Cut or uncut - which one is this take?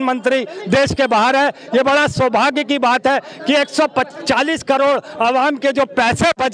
uncut